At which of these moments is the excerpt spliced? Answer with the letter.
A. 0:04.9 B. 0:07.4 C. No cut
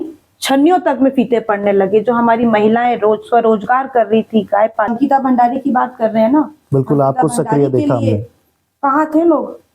A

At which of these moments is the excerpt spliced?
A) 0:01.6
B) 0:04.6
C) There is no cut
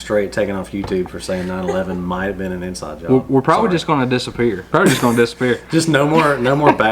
B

